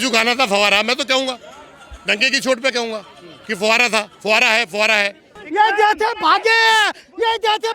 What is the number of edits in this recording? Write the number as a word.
one